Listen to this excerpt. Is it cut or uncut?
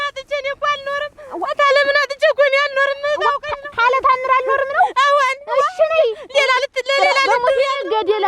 uncut